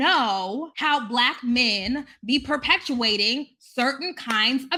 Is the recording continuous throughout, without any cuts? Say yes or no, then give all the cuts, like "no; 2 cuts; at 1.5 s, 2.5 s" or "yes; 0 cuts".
yes; 0 cuts